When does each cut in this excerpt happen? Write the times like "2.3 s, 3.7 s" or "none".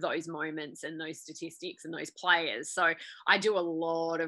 none